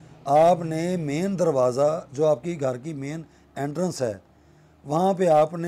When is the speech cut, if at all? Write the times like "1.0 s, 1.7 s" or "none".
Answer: none